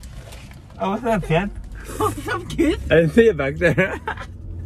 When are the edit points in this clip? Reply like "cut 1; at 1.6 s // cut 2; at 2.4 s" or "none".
none

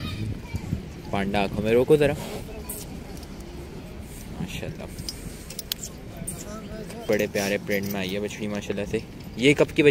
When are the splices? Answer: cut 1; at 7.1 s

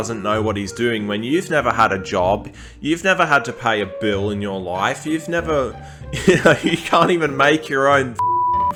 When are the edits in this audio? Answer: none

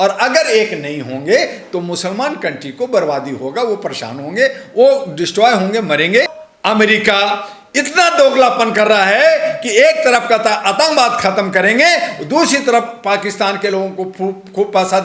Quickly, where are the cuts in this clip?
cut 1; at 6.4 s

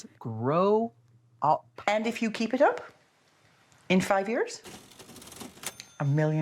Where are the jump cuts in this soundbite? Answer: cut 1; at 1.7 s

